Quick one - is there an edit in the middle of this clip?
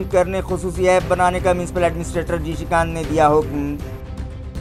no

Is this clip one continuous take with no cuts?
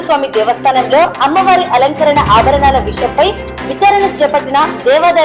yes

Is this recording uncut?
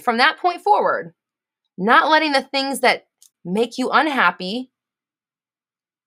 yes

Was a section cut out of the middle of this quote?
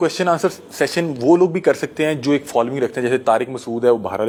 no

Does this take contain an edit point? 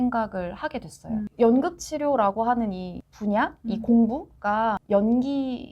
yes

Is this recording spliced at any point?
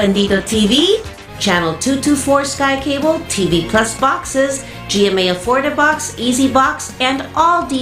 yes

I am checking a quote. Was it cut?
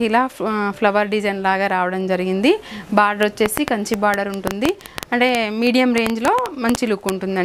no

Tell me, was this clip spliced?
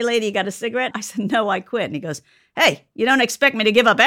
yes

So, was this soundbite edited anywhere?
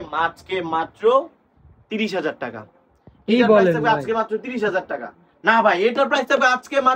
no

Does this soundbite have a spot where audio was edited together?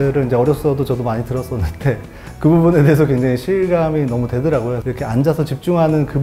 yes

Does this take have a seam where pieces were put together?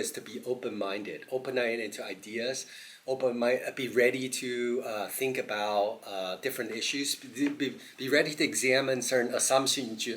no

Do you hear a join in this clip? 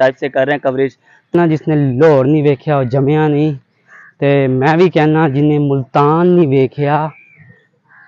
yes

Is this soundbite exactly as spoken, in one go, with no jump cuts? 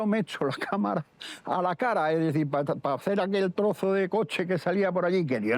yes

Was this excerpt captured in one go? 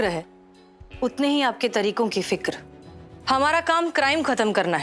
yes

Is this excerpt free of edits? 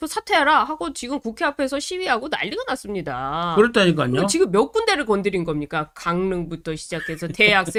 yes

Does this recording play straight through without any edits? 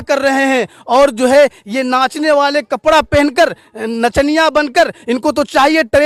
yes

